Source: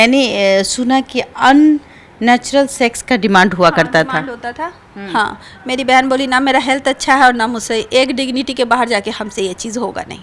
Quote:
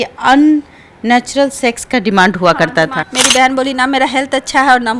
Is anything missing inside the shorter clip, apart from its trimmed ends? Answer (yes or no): yes